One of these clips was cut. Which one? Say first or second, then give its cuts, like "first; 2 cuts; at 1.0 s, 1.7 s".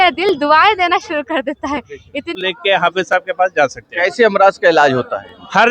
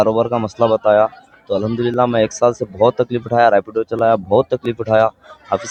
first; 1 cut; at 2.3 s